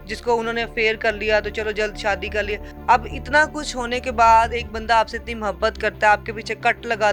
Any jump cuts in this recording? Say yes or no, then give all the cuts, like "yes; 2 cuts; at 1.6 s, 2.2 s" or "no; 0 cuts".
yes; 1 cut; at 2.7 s